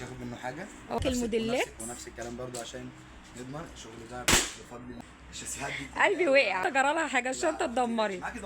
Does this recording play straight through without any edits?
no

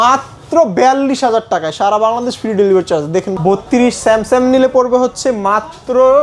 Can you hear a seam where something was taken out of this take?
yes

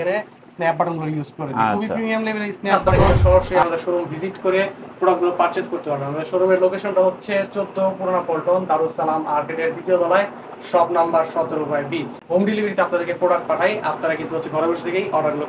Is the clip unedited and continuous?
no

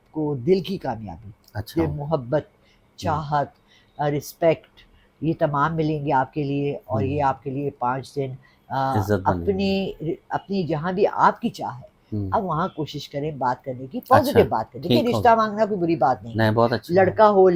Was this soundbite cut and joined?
no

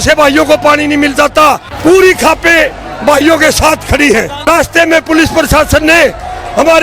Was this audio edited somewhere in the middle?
yes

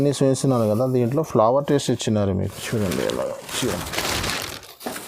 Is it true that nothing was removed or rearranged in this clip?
no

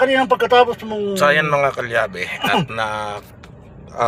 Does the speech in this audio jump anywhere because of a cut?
no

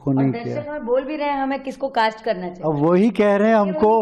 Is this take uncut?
yes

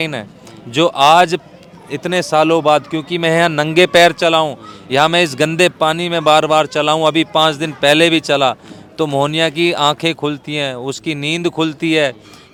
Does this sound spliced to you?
no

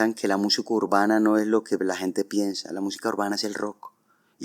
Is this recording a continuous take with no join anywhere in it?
yes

